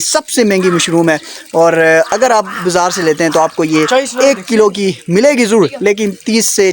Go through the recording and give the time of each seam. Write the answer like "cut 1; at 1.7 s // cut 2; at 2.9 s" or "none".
none